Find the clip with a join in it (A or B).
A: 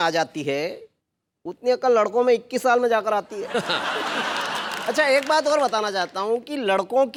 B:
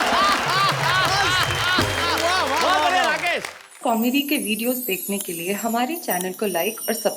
B